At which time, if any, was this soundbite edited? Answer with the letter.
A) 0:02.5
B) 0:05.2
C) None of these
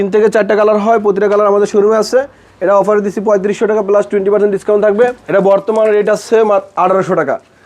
B